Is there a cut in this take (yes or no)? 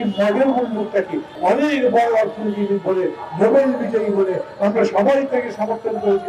yes